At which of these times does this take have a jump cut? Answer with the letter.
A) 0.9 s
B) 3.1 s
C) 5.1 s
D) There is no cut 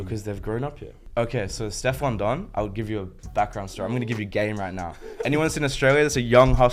A